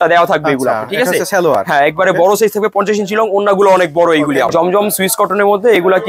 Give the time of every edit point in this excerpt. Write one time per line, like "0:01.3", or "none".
none